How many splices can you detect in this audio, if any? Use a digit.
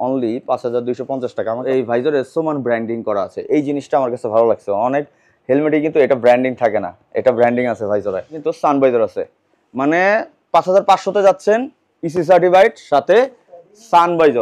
2